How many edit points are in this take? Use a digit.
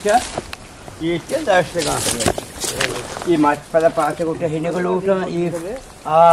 0